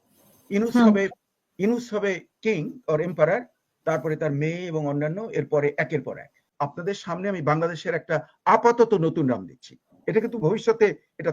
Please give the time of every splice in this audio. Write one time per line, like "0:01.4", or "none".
0:06.4